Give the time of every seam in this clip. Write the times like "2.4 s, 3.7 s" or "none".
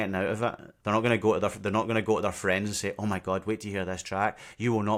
none